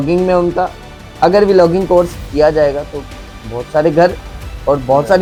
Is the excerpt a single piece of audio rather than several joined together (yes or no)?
yes